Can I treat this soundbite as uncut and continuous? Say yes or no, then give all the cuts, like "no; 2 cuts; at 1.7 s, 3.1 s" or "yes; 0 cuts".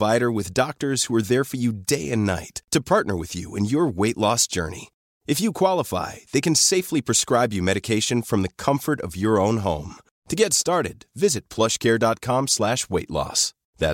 yes; 0 cuts